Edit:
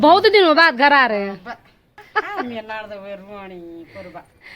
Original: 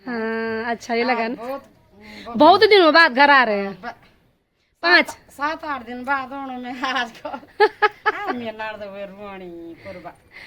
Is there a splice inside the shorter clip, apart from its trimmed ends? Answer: yes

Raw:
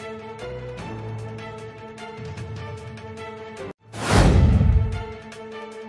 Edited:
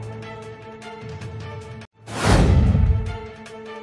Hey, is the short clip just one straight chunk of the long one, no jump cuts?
no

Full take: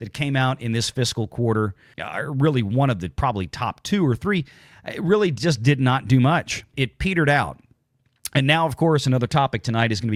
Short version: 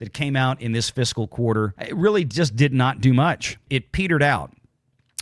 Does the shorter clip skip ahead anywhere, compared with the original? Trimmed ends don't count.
yes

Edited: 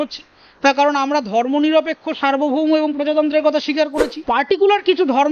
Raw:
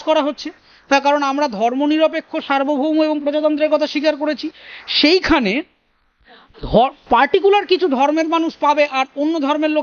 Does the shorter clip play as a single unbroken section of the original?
no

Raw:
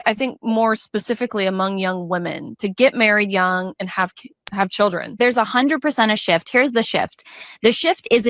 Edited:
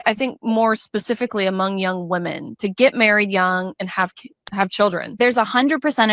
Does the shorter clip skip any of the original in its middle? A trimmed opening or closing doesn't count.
no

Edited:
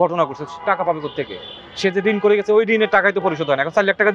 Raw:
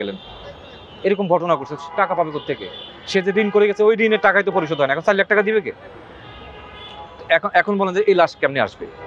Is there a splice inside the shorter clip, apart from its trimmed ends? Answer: no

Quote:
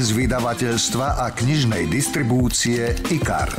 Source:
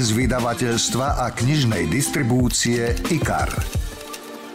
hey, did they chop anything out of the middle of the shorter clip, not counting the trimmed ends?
no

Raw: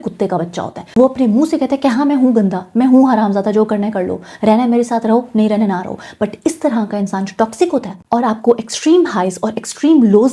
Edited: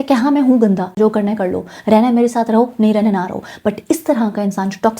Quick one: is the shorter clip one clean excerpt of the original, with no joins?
no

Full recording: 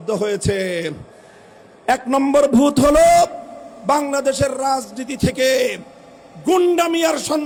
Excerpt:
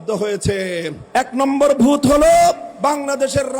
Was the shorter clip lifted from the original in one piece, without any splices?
no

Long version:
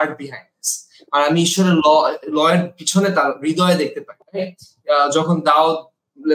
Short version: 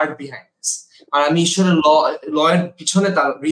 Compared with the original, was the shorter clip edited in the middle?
no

